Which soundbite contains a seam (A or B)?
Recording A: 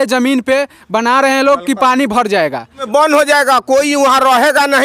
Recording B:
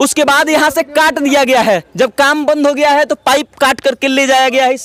A